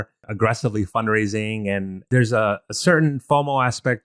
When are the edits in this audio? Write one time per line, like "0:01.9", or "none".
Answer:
0:02.0